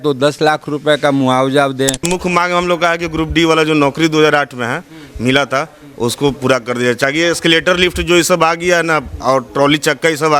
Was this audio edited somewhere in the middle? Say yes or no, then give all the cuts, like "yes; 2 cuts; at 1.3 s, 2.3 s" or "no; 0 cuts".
yes; 1 cut; at 2.1 s